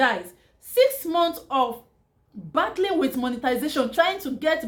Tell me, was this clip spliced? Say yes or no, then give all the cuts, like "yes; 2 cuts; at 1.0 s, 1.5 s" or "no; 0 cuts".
no; 0 cuts